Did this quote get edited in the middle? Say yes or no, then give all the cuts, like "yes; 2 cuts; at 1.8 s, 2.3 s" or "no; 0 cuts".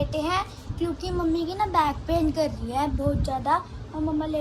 no; 0 cuts